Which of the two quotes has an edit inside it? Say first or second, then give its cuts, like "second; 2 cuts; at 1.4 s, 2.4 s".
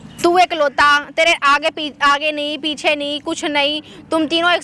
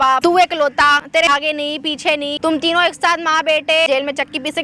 second; 3 cuts; at 1.1 s, 2.4 s, 3.9 s